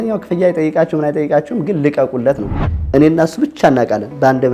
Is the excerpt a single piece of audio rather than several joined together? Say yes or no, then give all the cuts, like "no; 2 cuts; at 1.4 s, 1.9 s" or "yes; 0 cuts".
no; 1 cut; at 2.6 s